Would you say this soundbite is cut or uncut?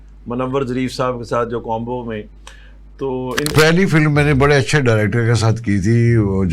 cut